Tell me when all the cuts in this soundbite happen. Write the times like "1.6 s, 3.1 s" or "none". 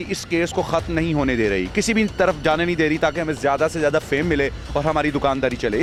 none